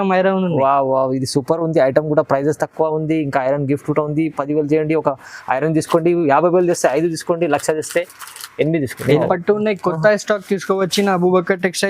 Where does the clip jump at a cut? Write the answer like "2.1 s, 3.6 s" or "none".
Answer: 9.2 s